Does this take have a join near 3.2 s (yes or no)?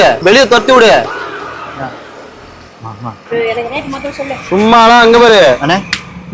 yes